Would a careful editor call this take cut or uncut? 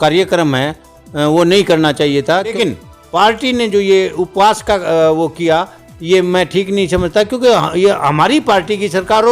cut